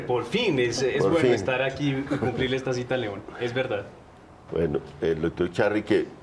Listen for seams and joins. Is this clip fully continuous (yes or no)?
no